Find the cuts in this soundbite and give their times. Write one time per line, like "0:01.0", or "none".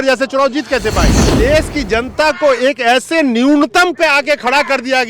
0:01.2